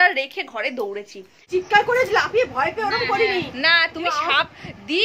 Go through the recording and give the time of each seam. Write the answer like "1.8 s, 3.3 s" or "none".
1.5 s